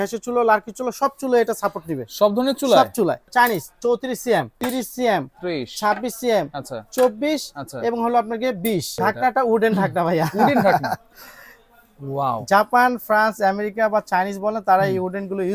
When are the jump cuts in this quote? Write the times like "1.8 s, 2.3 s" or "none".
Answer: 3.2 s, 4.6 s, 8.9 s